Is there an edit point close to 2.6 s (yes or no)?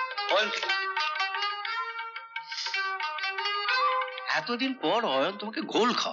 no